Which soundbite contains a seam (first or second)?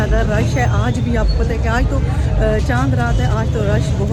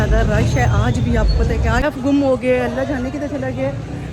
second